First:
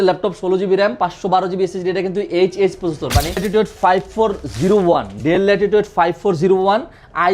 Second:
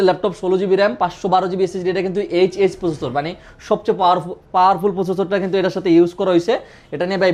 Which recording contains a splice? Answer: first; 1 cut; at 3.4 s

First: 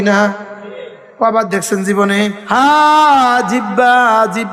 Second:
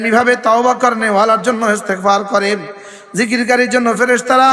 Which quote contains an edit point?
first; 1 cut; at 2.4 s

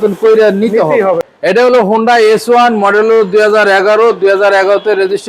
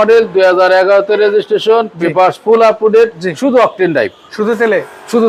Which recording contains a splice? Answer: first; 1 cut; at 1.2 s

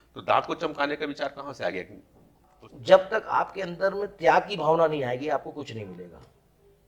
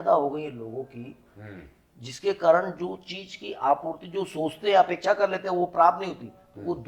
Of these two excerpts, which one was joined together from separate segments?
first; 1 cut; at 2.6 s

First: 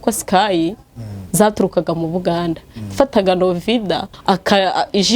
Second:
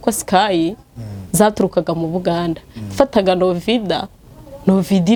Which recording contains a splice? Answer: first; 1 cut; at 4.1 s

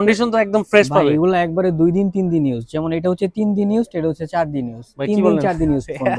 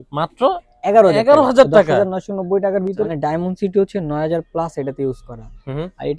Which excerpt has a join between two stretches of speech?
second; 1 cut; at 3.0 s

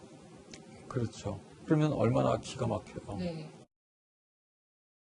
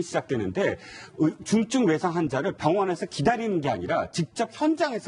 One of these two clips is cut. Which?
second; 1 cut; at 2.4 s

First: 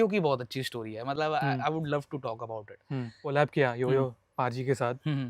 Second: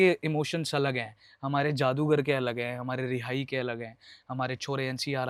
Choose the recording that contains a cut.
first; 1 cut; at 3.3 s

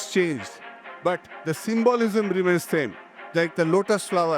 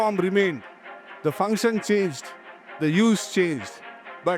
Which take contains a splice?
first; 1 cut; at 3.2 s

